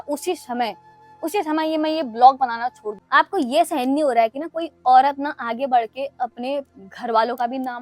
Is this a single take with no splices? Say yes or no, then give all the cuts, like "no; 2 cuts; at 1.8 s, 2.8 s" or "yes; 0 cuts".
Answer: no; 1 cut; at 2.9 s